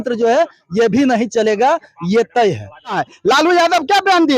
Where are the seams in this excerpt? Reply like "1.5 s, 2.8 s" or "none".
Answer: 3.1 s